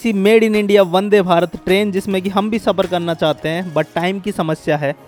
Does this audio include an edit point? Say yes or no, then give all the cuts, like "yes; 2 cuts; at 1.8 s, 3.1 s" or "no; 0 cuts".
no; 0 cuts